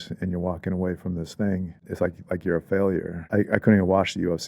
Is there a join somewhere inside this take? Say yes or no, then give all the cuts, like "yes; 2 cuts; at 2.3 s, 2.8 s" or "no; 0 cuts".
yes; 2 cuts; at 1.9 s, 3.2 s